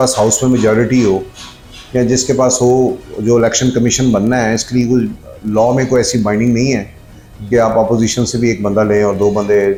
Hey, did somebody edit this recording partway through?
no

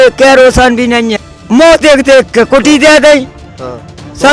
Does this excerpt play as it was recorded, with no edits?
no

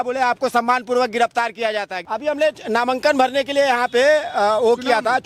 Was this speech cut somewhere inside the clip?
yes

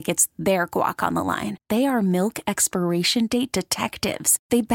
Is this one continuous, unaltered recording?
yes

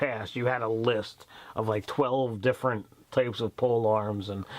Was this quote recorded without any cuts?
no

